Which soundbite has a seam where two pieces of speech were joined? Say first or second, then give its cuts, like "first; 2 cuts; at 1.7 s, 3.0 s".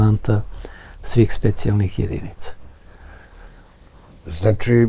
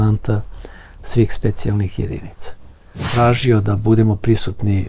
second; 1 cut; at 3.1 s